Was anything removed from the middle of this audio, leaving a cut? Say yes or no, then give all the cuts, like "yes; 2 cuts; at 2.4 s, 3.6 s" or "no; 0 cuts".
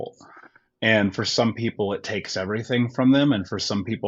no; 0 cuts